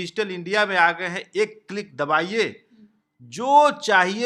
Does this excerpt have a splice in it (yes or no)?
no